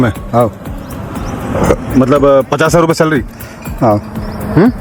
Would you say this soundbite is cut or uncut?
uncut